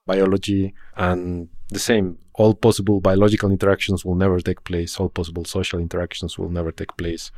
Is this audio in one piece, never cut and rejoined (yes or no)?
no